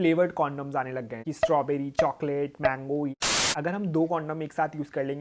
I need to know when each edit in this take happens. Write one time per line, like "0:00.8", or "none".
0:01.2
0:03.1